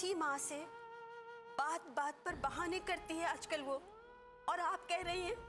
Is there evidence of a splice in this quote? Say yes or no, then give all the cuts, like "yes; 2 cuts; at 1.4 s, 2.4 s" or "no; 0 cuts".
no; 0 cuts